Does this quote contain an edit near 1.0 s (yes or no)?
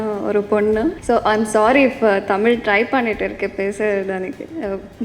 yes